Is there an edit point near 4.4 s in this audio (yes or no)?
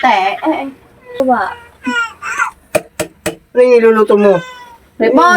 no